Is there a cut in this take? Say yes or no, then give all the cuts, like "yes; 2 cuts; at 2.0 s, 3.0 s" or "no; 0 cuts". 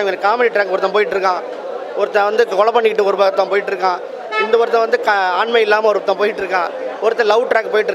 no; 0 cuts